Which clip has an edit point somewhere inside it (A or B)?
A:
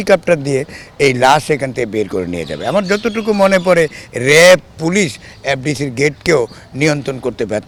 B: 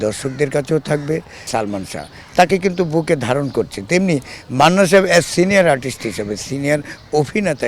B